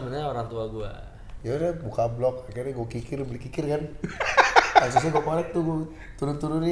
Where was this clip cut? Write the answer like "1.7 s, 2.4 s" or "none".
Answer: 1.3 s